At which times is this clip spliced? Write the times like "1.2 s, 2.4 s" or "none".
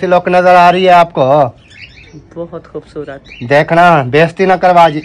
none